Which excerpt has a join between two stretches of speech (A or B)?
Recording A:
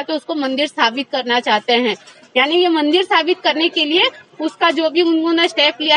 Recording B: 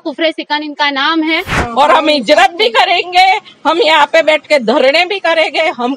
B